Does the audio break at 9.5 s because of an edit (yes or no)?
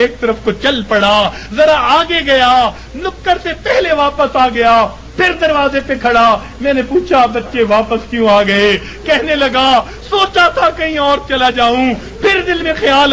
yes